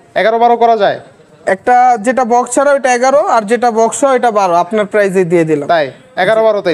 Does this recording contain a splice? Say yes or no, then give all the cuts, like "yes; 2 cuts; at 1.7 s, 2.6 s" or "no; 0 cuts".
no; 0 cuts